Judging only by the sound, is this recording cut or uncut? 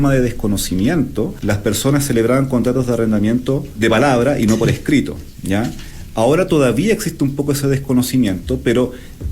cut